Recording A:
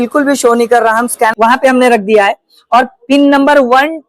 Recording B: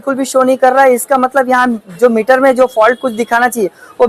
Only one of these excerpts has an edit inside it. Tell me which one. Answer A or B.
A